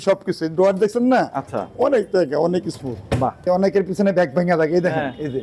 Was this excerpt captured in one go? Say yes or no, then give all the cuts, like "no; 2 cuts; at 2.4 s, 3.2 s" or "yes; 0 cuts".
no; 1 cut; at 3.3 s